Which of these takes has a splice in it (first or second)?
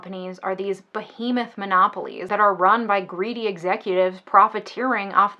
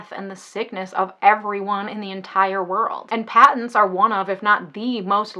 first